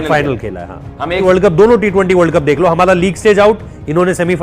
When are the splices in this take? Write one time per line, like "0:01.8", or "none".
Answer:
0:01.2